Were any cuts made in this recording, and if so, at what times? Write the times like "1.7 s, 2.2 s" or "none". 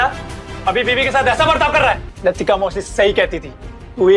2.1 s